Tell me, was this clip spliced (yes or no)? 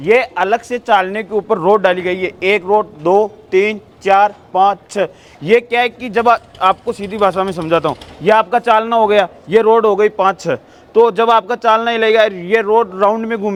no